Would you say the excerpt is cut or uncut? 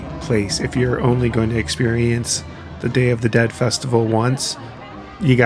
uncut